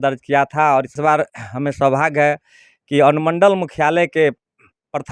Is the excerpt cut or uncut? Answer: cut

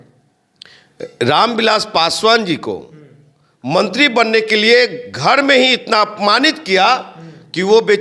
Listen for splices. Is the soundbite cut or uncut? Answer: uncut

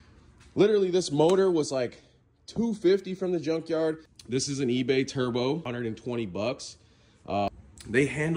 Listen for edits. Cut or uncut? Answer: cut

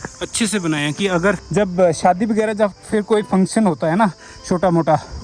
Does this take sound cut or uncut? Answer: cut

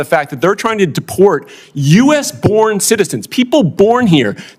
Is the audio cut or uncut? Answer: uncut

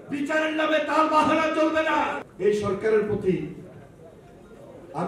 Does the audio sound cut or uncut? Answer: cut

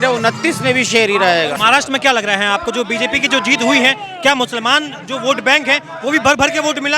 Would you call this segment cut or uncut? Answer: cut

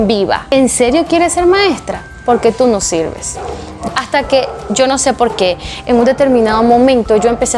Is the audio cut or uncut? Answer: cut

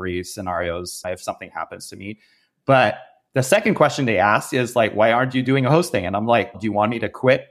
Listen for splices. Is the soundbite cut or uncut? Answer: cut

